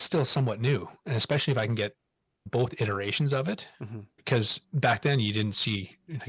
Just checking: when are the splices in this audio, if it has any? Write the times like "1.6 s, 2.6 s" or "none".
none